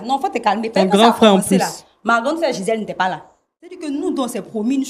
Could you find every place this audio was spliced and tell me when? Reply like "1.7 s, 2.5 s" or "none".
3.8 s